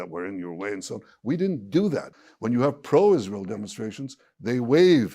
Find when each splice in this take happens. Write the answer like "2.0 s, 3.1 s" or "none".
2.1 s